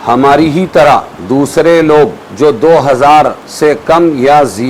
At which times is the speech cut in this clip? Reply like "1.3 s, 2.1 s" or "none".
1.1 s, 3.4 s